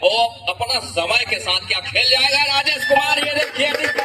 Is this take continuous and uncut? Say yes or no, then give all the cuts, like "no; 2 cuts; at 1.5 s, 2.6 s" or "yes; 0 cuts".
yes; 0 cuts